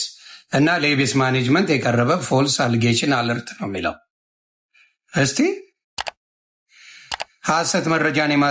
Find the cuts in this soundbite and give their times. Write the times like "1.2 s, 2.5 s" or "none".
none